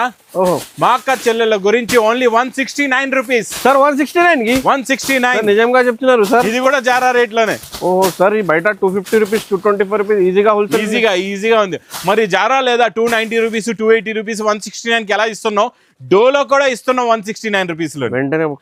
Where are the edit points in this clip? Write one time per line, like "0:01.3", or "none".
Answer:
none